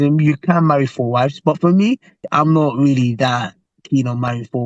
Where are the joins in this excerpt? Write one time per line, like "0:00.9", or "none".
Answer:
0:02.3